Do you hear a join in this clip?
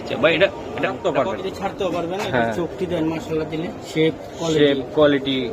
yes; 1 cut; at 1.0 s

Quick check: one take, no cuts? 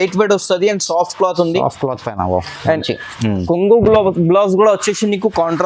yes; 0 cuts

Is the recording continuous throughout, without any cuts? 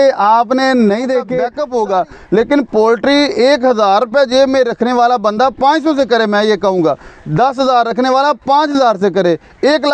no; 1 cut; at 1.6 s

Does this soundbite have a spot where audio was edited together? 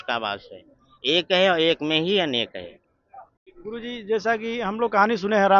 no; 0 cuts

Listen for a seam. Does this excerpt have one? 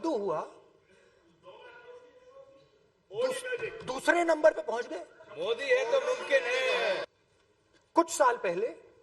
yes; 1 cut; at 7.0 s

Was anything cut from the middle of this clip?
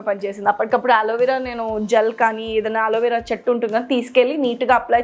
no; 0 cuts

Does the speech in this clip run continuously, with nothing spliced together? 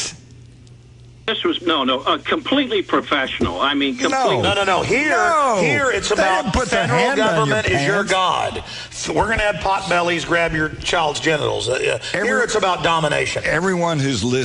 no; 1 cut; at 12.5 s

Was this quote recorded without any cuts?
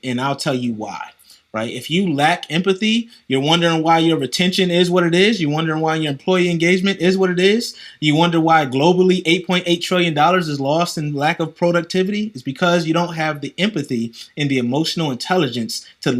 yes; 0 cuts

